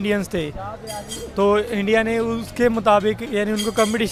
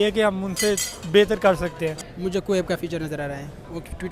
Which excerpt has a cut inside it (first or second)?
second